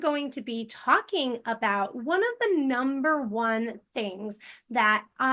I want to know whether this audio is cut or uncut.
uncut